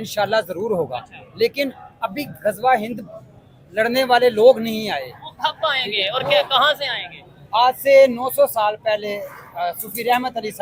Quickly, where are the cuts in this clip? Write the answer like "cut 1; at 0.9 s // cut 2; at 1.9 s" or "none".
none